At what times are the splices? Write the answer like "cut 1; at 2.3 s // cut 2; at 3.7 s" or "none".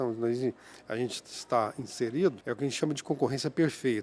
cut 1; at 2.4 s

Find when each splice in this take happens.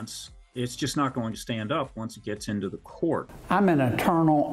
cut 1; at 3.3 s

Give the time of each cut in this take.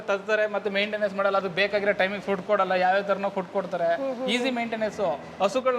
none

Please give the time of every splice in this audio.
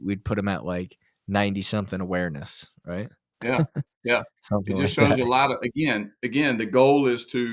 none

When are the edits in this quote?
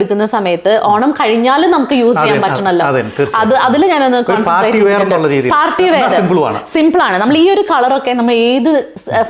none

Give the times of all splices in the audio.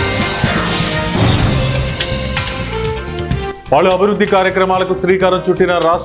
cut 1; at 3.5 s

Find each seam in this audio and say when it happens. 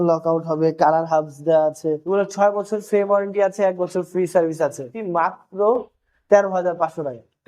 cut 1; at 2.1 s // cut 2; at 4.9 s

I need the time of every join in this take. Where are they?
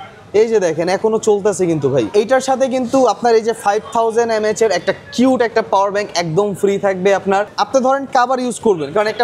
cut 1; at 2.1 s // cut 2; at 7.5 s

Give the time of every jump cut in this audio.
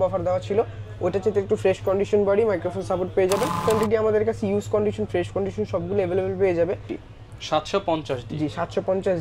cut 1; at 3.6 s // cut 2; at 6.9 s

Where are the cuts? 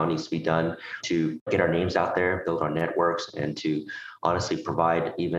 cut 1; at 0.9 s

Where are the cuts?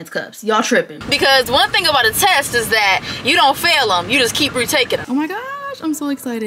cut 1; at 1.0 s // cut 2; at 5.0 s

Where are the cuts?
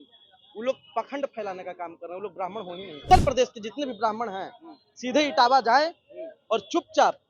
cut 1; at 3.0 s

